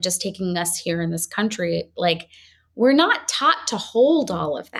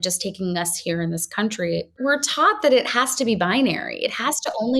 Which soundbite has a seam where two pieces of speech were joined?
second; 1 cut; at 2.0 s

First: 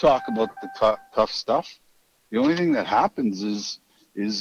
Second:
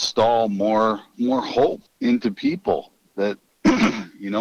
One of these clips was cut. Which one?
second; 3 cuts; at 1.1 s, 1.9 s, 3.5 s

